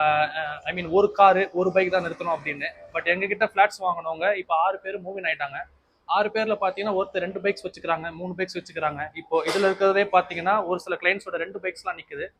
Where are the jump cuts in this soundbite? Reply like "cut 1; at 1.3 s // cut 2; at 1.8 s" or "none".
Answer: none